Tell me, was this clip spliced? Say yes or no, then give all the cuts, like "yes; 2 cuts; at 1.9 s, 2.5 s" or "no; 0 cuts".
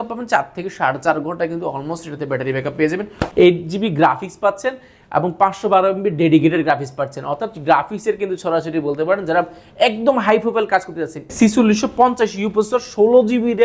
yes; 2 cuts; at 3.2 s, 11.2 s